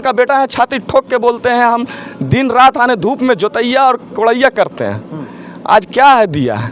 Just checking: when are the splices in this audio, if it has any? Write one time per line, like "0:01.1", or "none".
none

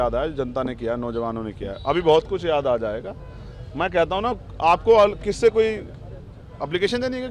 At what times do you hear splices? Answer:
none

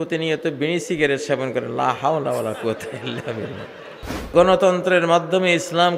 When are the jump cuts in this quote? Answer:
0:04.3

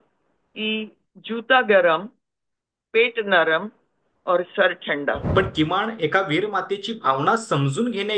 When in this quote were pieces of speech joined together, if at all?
0:01.1
0:05.2

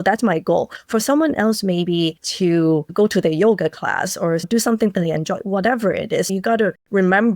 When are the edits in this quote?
0:02.9
0:04.5
0:06.3

